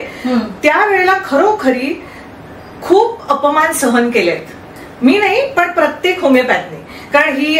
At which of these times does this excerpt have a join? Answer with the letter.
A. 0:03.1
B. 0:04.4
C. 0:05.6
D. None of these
D